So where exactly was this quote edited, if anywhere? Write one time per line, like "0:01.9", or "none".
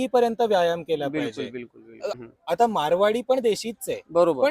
0:02.2